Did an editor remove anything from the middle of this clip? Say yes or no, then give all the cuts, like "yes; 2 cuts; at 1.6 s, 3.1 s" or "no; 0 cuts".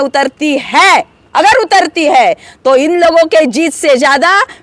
no; 0 cuts